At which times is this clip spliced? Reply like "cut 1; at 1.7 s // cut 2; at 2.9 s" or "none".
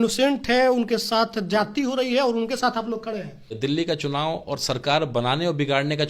cut 1; at 3.5 s